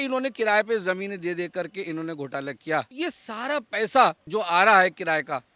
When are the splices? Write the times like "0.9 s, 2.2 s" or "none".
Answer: 3.0 s, 4.2 s